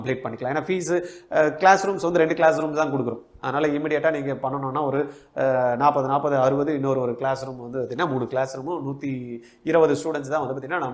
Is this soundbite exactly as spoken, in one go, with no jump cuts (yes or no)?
yes